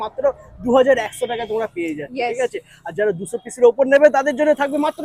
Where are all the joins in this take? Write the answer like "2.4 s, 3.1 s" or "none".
none